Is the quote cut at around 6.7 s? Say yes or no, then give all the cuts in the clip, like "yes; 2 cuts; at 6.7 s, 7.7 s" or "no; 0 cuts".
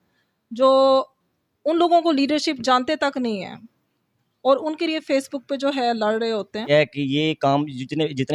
yes; 1 cut; at 6.7 s